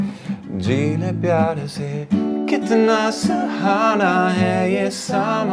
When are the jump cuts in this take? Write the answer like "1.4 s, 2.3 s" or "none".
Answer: none